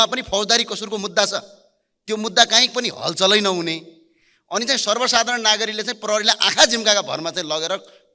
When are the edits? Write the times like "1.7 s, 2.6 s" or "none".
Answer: none